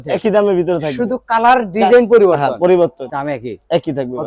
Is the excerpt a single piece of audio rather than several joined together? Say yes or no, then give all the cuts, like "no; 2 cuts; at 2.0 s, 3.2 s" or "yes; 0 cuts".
yes; 0 cuts